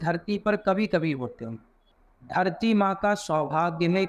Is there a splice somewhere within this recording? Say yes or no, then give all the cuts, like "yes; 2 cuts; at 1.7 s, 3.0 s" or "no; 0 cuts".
yes; 1 cut; at 1.8 s